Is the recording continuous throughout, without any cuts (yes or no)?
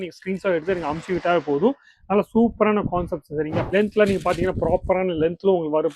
no